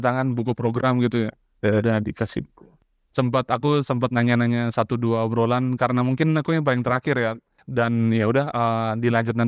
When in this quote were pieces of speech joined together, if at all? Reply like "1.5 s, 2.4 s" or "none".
none